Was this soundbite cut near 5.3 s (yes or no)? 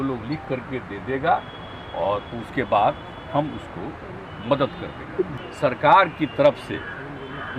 yes